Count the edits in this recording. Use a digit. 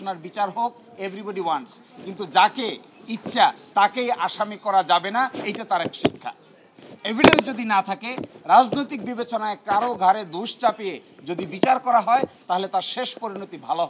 0